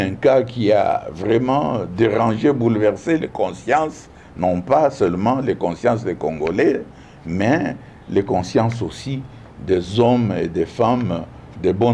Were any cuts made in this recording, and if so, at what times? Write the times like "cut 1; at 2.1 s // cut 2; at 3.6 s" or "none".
none

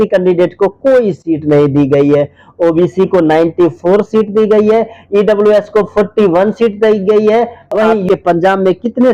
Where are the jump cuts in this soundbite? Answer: cut 1; at 8.0 s

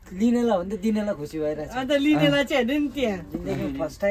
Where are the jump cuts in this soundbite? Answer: none

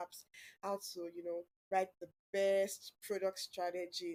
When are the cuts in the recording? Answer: none

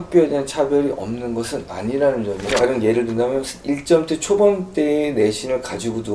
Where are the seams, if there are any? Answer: cut 1; at 2.6 s

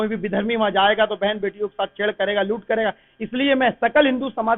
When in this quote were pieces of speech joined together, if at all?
none

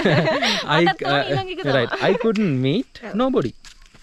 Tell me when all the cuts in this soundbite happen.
none

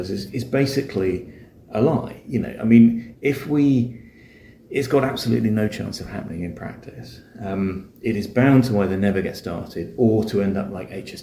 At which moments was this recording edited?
none

